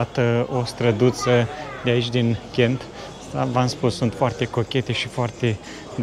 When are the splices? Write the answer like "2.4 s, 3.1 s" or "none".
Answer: none